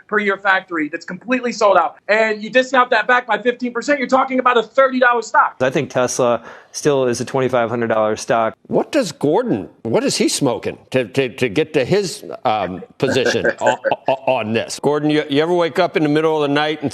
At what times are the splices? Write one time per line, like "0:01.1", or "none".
0:02.0
0:05.6
0:08.6
0:09.7
0:14.8